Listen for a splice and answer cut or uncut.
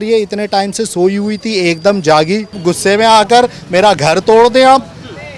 cut